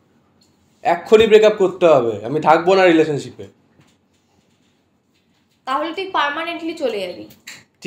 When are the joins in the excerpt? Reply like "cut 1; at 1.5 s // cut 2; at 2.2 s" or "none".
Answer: none